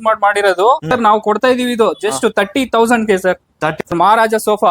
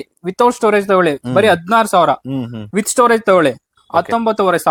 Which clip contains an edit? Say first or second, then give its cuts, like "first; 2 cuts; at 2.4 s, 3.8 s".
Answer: first; 2 cuts; at 0.9 s, 3.7 s